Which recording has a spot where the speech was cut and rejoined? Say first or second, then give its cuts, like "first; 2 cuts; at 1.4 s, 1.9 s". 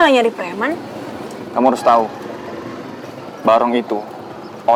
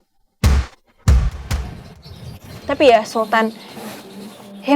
second; 1 cut; at 1.6 s